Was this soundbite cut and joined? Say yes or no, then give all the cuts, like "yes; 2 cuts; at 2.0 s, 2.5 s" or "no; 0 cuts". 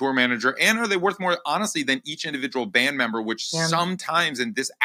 no; 0 cuts